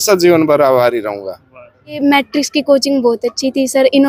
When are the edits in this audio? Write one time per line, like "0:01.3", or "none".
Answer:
0:02.0